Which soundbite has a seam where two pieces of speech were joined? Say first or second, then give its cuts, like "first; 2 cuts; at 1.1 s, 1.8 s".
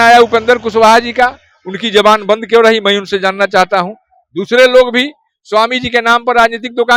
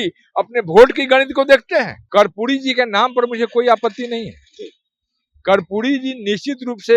second; 1 cut; at 2.0 s